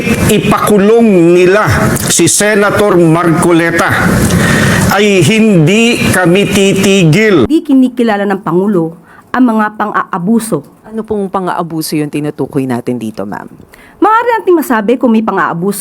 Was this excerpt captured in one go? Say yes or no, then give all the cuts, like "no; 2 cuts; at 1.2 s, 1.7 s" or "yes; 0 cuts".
no; 2 cuts; at 7.5 s, 10.8 s